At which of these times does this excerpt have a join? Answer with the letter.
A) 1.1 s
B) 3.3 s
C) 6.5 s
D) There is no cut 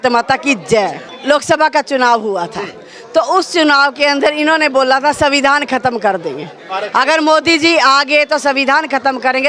A